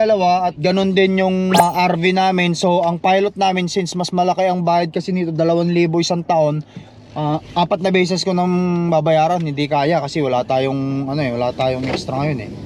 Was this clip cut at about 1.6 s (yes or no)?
yes